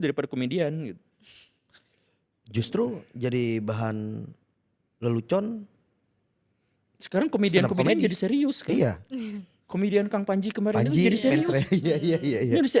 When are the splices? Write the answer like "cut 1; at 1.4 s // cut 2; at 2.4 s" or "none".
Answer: none